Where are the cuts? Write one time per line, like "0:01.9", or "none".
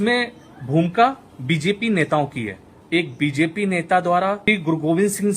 0:02.9
0:04.4